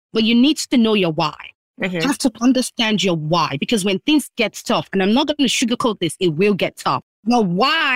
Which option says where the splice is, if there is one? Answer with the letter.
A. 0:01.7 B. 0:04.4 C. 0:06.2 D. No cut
A